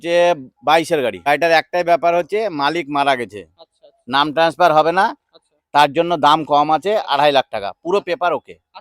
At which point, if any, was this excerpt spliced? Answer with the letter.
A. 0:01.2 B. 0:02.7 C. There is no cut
A